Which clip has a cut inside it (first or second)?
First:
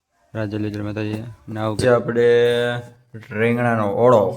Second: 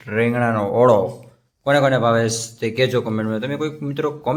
first